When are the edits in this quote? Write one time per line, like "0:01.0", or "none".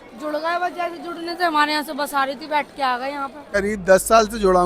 0:03.5